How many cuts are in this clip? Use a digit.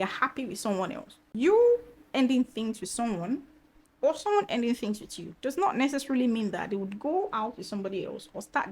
1